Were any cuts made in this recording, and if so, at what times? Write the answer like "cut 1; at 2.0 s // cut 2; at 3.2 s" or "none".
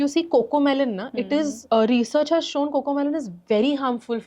cut 1; at 1.6 s